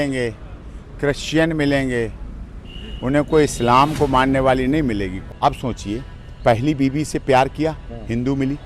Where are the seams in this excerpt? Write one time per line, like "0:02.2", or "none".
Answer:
0:05.2

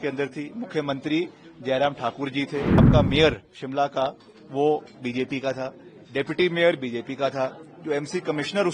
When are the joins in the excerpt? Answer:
0:02.9

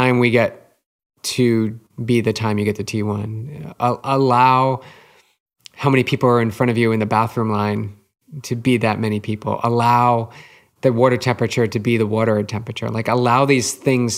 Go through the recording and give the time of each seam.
0:01.8

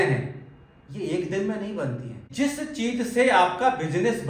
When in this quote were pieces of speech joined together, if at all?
0:02.3

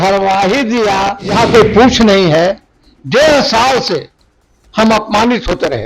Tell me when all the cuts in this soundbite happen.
0:01.4

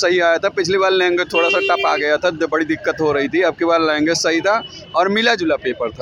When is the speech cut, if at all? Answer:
none

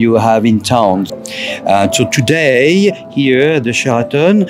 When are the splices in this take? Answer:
0:01.1

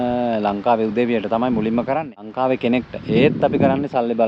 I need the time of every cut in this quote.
0:02.2

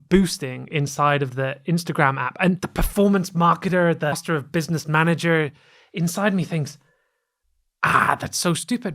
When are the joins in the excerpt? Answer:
0:02.6
0:04.2

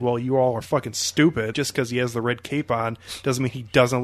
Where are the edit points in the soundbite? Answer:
0:01.5

